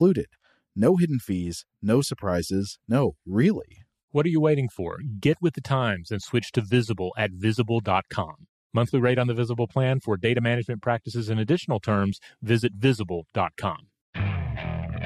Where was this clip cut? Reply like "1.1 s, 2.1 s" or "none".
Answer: 13.9 s